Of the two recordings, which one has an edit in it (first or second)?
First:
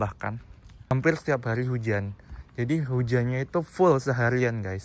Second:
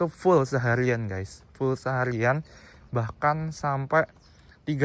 first